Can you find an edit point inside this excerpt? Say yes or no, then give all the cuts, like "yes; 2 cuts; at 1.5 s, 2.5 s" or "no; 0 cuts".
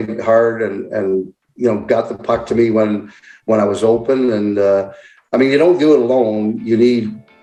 no; 0 cuts